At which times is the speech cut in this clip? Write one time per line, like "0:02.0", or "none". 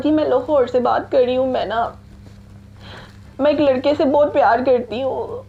none